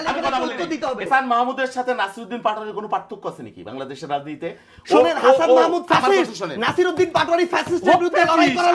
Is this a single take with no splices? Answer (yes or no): no